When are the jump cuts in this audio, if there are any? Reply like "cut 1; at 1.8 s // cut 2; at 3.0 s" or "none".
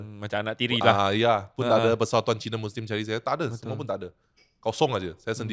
none